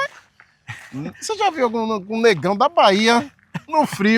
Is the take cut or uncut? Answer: uncut